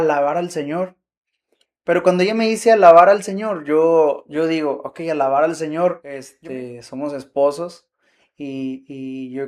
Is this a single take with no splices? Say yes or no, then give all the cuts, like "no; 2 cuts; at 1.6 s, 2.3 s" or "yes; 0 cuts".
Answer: no; 1 cut; at 6.3 s